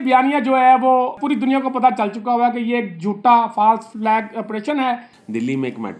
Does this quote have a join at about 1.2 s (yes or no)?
yes